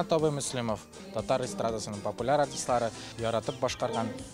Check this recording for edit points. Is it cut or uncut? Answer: cut